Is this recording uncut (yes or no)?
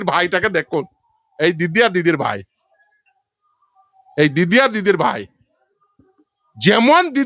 yes